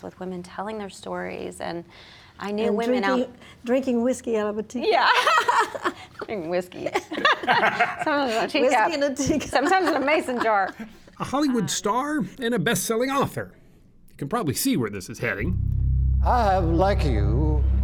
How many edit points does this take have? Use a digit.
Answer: 0